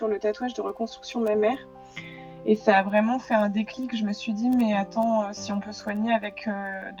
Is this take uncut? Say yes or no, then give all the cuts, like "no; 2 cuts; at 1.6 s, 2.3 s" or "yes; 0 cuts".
yes; 0 cuts